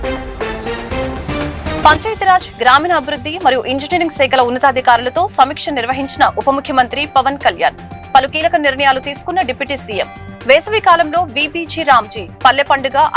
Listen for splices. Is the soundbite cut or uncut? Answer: cut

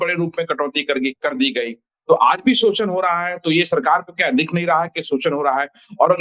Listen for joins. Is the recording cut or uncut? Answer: uncut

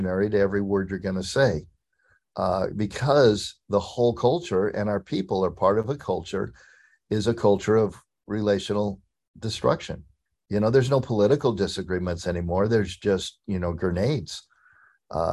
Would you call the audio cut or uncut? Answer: uncut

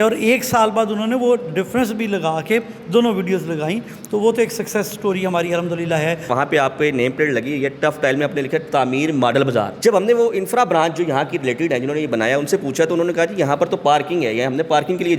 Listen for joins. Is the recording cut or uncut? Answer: cut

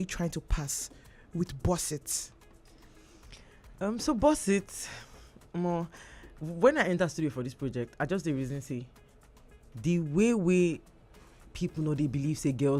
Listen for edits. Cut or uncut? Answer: uncut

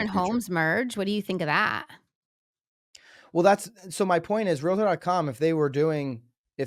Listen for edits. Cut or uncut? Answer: uncut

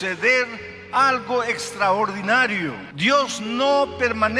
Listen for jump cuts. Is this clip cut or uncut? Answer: uncut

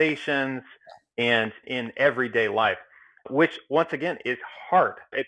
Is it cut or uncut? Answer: uncut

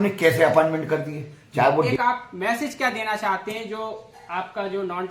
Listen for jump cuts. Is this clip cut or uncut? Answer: cut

